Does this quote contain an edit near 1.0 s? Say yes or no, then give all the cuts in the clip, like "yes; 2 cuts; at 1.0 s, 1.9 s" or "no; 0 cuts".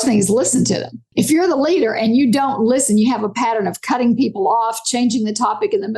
yes; 1 cut; at 1.0 s